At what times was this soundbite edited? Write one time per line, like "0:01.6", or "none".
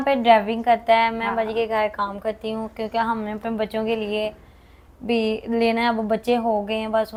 none

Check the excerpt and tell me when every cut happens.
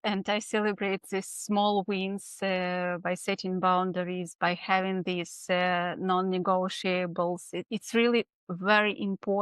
none

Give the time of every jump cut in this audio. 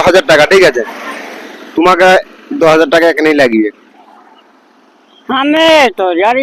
none

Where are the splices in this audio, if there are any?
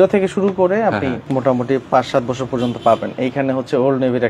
0:01.2

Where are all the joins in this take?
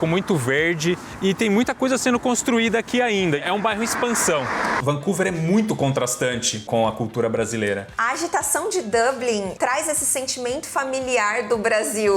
0:01.1
0:03.4
0:04.8
0:08.0

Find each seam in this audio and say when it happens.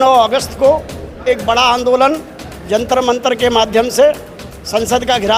none

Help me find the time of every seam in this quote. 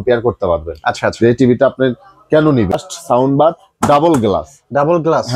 0:02.8

